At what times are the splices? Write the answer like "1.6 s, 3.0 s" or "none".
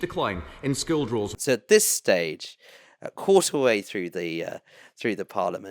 1.3 s

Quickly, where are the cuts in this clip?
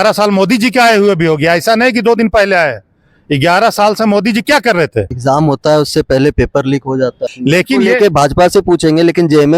5.1 s, 7.3 s

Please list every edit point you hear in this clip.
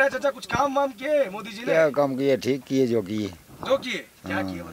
none

